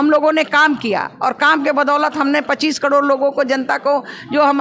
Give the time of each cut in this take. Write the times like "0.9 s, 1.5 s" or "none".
none